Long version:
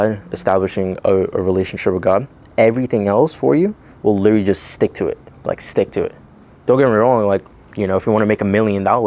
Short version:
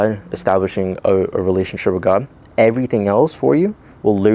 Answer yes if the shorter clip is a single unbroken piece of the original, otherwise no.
yes